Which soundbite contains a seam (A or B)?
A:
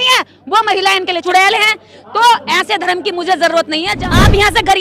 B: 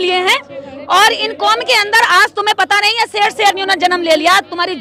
A